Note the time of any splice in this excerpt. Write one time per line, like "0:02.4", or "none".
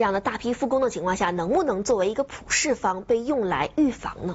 none